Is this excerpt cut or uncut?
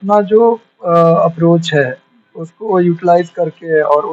uncut